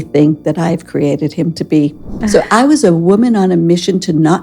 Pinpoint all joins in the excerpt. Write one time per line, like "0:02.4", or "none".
0:02.2